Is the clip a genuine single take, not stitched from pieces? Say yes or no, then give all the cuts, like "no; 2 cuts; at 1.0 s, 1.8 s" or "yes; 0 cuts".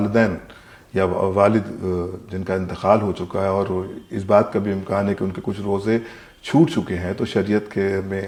yes; 0 cuts